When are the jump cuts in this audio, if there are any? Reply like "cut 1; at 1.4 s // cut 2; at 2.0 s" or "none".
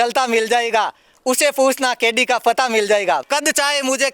cut 1; at 3.2 s